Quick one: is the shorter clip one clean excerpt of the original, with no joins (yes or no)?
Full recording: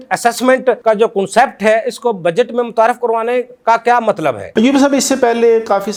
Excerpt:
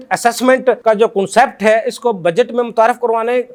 yes